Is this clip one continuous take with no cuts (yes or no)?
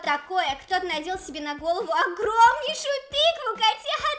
yes